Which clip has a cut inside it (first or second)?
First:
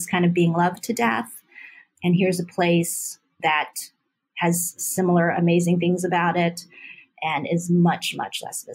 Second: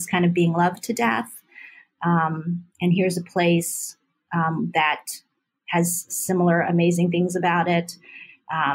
first